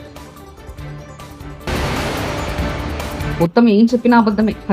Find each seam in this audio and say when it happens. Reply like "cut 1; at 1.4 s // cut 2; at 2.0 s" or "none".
cut 1; at 1.4 s // cut 2; at 3.2 s